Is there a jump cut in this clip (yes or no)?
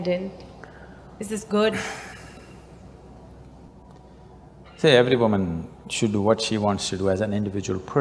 no